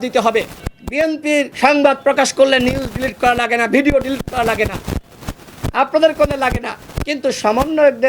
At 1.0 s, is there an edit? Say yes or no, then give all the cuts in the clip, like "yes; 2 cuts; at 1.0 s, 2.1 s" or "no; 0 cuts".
yes; 1 cut; at 1.0 s